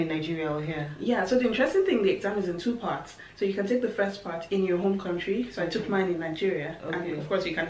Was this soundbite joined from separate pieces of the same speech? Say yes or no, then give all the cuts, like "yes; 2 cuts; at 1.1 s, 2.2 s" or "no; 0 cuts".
no; 0 cuts